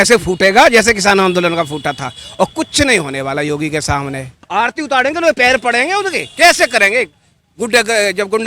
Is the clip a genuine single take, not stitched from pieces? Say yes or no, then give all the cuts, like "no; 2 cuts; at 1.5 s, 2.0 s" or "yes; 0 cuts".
no; 1 cut; at 4.4 s